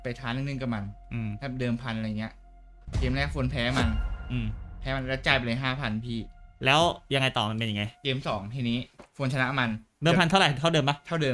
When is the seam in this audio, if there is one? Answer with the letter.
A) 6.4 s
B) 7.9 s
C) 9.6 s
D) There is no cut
A